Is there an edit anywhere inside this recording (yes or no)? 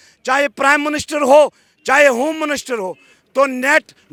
no